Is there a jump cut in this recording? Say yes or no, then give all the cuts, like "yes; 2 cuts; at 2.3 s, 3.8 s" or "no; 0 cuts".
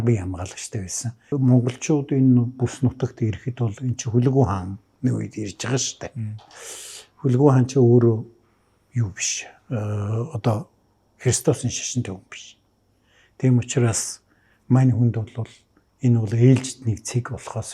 yes; 1 cut; at 1.3 s